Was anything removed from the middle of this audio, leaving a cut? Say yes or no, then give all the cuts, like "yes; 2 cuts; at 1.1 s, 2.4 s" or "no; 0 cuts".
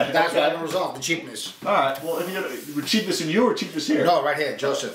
no; 0 cuts